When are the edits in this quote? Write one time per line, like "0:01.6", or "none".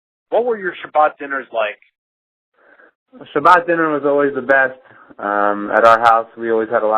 0:02.7